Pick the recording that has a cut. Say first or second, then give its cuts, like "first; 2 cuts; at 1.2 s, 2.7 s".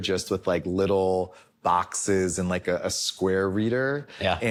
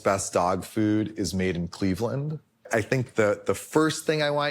second; 1 cut; at 2.7 s